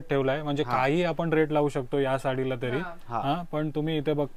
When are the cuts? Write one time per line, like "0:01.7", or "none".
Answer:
none